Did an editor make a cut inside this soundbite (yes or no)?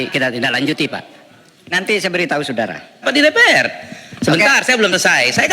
yes